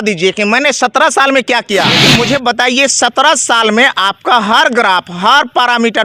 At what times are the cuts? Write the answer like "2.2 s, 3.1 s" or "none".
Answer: 2.0 s